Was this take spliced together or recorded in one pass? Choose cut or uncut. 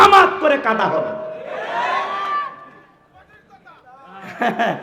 uncut